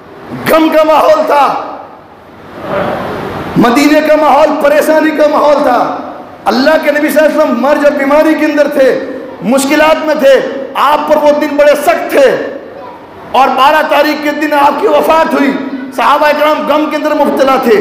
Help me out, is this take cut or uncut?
uncut